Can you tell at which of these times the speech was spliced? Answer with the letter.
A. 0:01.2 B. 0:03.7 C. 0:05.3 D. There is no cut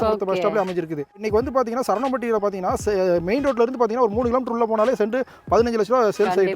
A